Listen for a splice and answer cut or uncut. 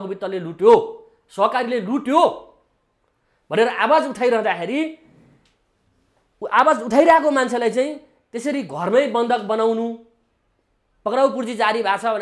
uncut